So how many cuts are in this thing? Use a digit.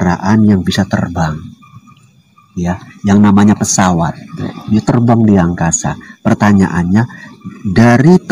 0